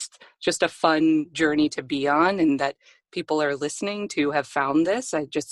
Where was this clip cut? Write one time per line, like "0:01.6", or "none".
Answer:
none